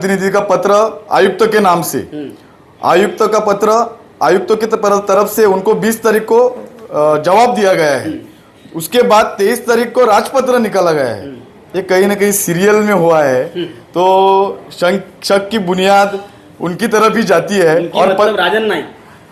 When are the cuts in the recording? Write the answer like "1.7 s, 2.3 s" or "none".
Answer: none